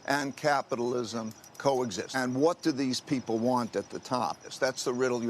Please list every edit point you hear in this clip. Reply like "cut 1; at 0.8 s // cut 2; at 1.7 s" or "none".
cut 1; at 2.2 s // cut 2; at 4.5 s